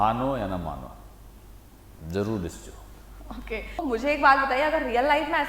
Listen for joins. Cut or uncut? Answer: cut